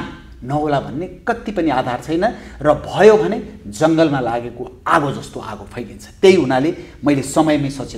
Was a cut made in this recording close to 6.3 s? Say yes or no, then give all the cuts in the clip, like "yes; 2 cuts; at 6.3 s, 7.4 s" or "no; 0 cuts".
no; 0 cuts